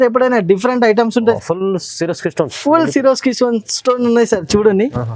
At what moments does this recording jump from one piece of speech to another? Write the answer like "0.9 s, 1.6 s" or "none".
1.4 s